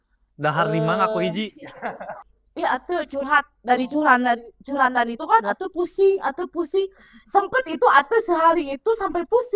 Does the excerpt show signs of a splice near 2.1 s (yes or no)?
yes